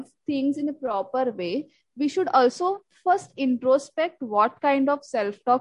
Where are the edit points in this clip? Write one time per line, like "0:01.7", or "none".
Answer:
none